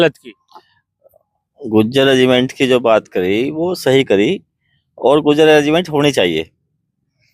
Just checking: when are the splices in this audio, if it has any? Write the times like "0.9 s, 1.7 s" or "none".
none